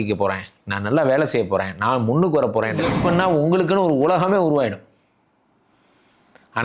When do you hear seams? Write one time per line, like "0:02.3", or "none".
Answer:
0:02.9